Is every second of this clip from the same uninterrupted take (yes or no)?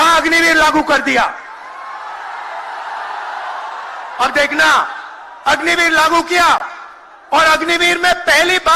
yes